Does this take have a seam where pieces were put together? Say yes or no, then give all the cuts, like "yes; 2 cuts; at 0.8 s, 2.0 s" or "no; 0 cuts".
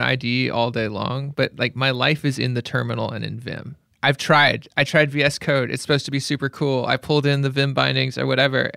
no; 0 cuts